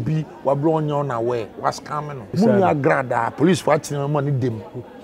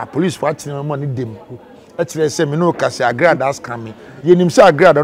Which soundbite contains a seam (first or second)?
first